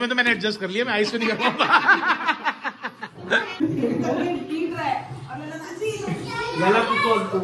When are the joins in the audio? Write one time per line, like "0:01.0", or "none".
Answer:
0:03.5